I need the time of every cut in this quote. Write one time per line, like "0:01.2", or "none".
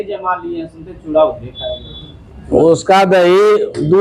none